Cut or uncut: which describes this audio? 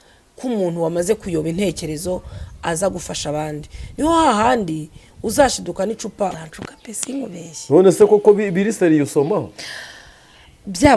cut